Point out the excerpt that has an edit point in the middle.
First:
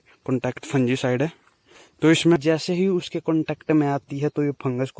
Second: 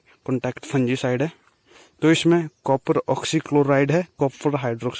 first; 1 cut; at 2.4 s

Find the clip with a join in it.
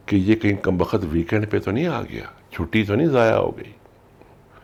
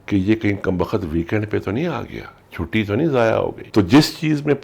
second; 1 cut; at 3.6 s

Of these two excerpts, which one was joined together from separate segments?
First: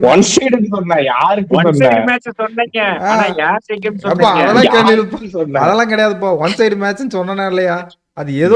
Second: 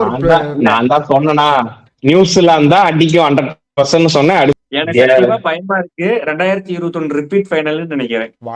second; 1 cut; at 4.6 s

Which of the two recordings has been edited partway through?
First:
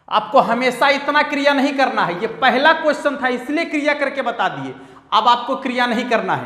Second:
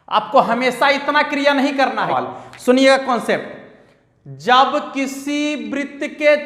second; 1 cut; at 2.1 s

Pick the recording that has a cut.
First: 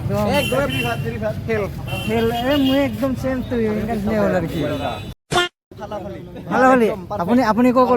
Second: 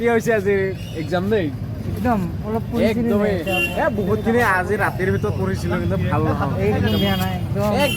first; 1 cut; at 5.5 s

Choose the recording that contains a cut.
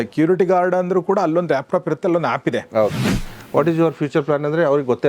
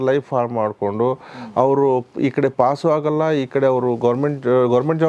first; 1 cut; at 3.1 s

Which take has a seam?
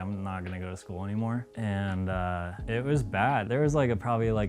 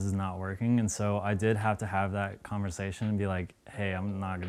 first; 3 cuts; at 1.5 s, 2.6 s, 3.5 s

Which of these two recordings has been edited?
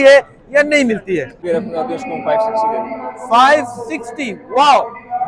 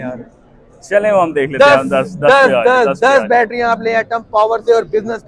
first; 1 cut; at 1.3 s

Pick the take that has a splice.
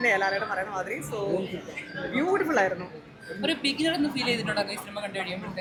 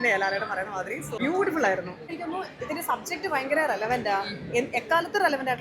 second; 2 cuts; at 1.1 s, 2.1 s

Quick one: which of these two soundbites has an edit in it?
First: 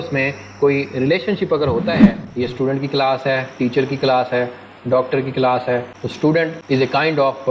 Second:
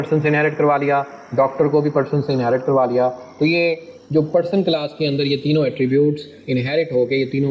first; 1 cut; at 2.2 s

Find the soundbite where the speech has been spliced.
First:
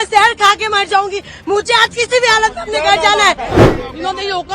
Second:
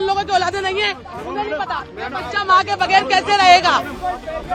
first; 1 cut; at 3.6 s

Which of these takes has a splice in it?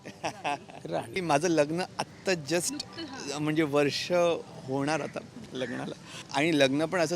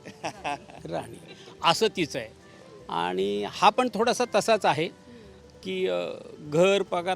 first; 2 cuts; at 1.2 s, 6.2 s

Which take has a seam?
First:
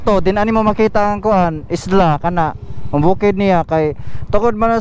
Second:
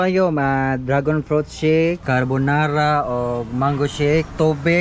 second; 1 cut; at 2.0 s

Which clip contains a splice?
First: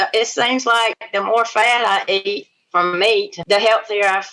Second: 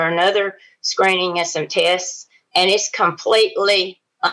first; 1 cut; at 3.4 s

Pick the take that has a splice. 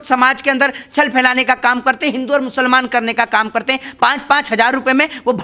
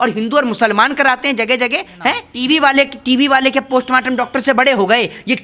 second; 1 cut; at 2.3 s

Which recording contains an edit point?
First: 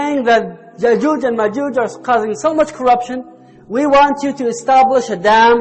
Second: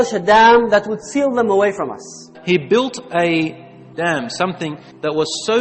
second; 2 cuts; at 2.3 s, 3.9 s

